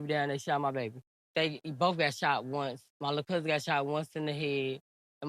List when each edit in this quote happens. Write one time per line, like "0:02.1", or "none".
0:01.3